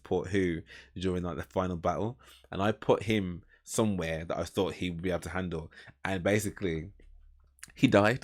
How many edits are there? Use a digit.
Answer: 0